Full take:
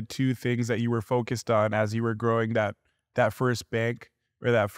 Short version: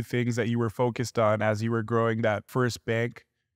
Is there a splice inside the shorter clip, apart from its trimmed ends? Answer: yes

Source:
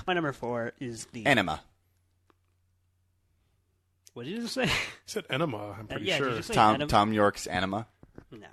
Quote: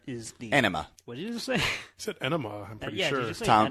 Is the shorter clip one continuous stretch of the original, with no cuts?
no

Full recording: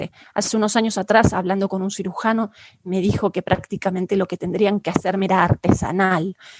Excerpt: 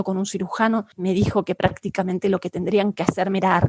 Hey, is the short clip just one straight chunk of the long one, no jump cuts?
no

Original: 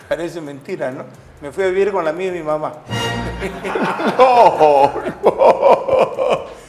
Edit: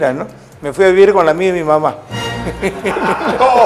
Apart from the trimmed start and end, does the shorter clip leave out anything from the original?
no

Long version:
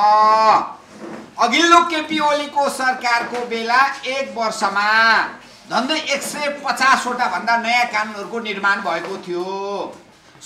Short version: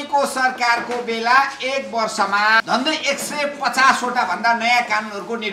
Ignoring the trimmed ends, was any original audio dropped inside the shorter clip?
yes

